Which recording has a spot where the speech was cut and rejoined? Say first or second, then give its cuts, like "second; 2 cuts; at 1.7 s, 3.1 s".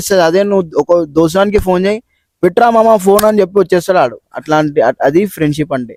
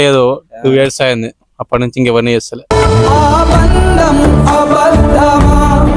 second; 1 cut; at 2.5 s